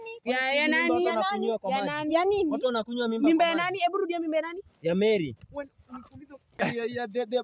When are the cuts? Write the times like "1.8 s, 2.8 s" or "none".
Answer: 6.5 s